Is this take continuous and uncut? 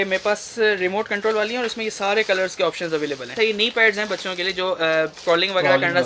no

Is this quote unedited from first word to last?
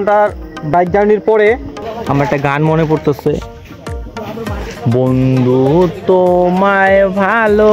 no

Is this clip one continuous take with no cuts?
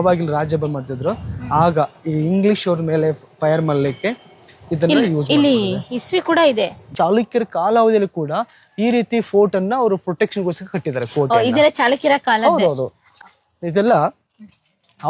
no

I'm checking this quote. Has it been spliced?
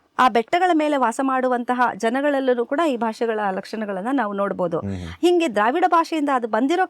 no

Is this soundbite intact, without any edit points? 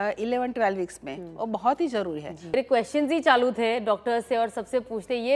no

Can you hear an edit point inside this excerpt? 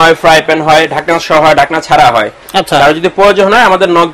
no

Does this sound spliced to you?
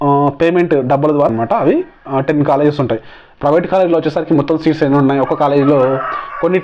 yes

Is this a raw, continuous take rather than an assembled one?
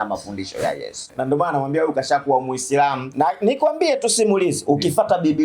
no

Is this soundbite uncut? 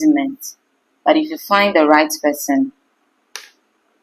yes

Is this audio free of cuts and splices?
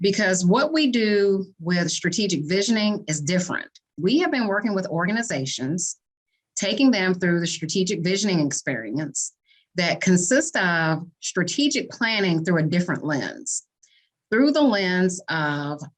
no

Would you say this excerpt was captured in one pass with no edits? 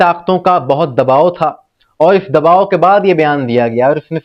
yes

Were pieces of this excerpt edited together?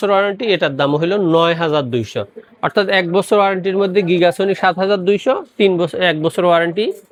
no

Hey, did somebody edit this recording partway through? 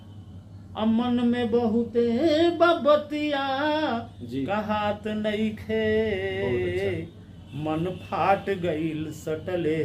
no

